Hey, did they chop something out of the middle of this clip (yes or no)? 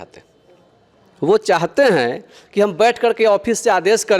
no